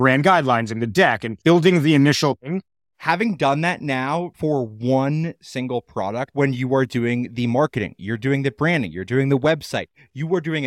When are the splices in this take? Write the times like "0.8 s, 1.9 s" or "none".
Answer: 1.3 s, 2.5 s, 6.3 s

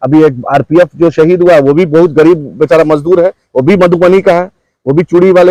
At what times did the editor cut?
none

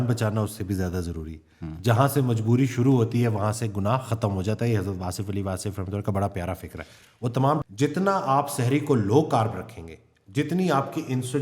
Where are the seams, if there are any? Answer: 7.6 s

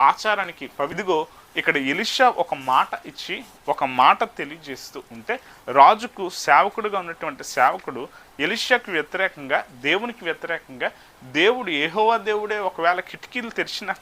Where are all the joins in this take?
1.0 s

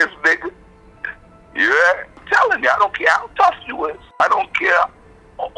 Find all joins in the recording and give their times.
2.2 s, 4.2 s

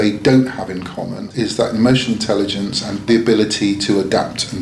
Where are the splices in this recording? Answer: 1.3 s, 3.0 s

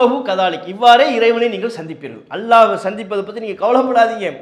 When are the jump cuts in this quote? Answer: none

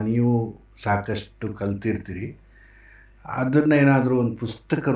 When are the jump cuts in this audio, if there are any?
none

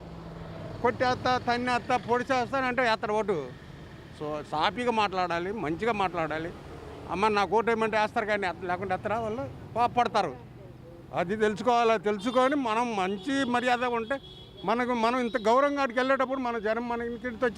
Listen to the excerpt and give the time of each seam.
none

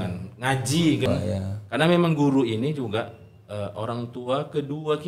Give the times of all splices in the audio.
1.1 s

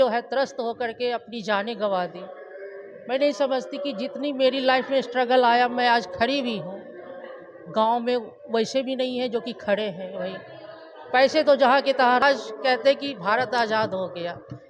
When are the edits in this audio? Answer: 12.2 s

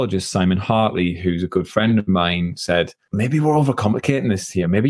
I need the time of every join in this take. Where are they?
3.0 s

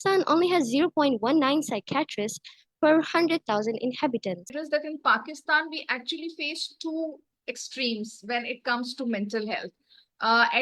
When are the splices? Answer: 4.6 s

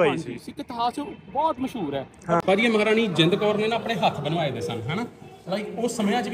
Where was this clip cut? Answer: 2.4 s

